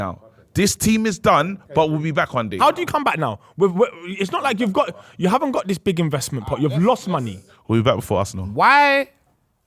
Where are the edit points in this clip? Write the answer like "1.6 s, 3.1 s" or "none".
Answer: 2.6 s